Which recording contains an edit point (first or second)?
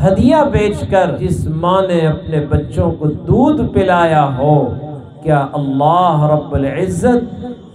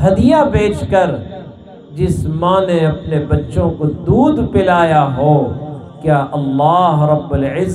first